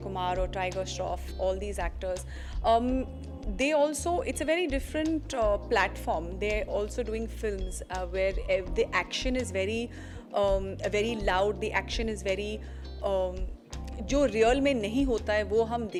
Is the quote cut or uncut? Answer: uncut